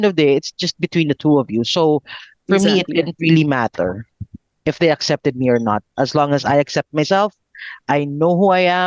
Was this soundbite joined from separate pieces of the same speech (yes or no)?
no